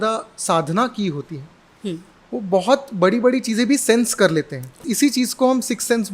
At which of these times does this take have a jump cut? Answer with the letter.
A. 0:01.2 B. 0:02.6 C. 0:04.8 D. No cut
C